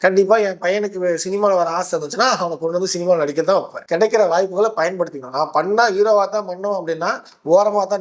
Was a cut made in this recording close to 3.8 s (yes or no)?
yes